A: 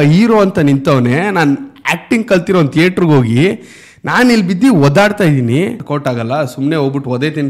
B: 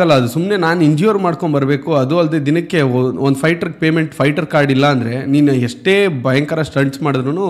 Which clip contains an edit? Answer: A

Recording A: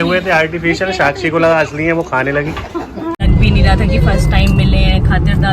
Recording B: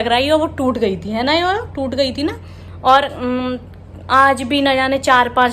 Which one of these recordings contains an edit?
A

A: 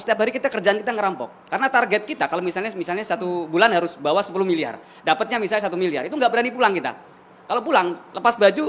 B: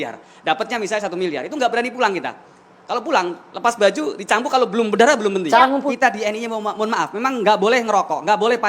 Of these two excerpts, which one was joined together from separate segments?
B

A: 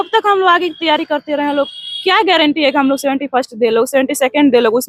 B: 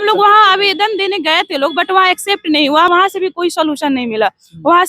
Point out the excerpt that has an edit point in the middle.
B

